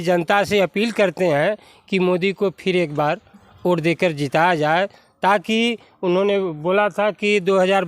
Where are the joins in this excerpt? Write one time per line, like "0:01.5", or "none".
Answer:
none

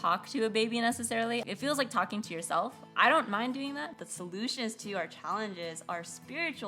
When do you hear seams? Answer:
0:01.4
0:03.9

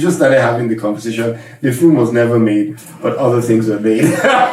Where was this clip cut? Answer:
none

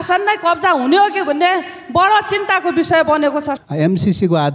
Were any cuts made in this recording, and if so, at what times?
0:03.5

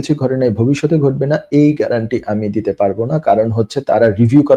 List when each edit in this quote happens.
none

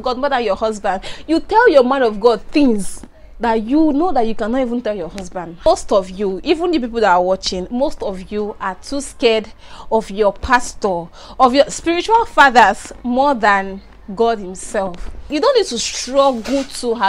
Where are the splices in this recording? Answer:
0:05.7
0:15.3

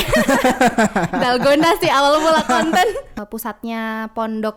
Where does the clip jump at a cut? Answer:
0:03.1

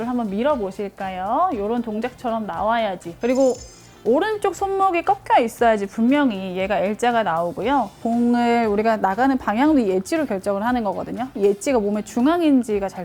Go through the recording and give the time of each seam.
0:03.1
0:08.0
0:11.3

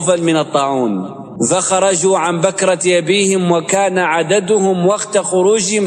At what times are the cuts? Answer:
0:01.2

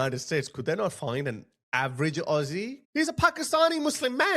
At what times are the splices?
0:02.8

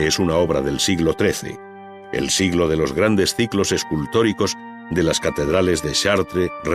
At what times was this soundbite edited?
0:02.0

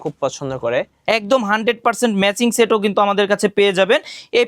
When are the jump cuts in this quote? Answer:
0:00.9

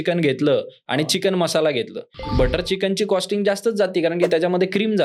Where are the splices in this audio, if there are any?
none

